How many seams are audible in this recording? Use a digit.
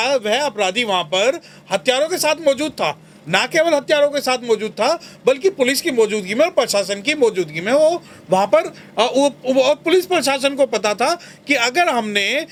0